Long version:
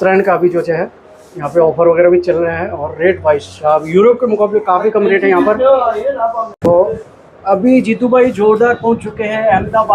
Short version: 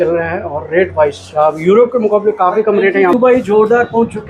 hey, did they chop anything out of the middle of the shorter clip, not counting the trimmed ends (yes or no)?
yes